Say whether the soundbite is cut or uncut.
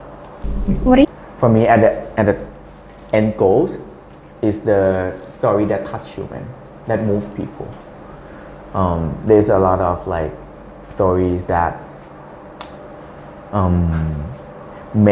cut